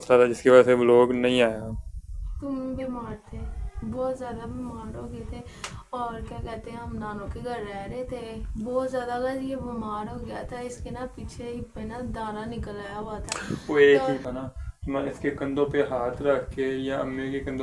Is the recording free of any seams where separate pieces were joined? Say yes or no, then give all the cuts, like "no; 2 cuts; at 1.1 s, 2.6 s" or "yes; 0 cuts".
no; 1 cut; at 14.3 s